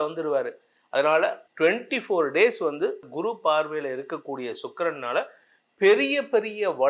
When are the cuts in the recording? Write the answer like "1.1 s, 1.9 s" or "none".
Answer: 1.4 s, 3.1 s